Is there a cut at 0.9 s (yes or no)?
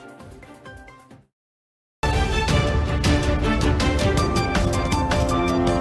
yes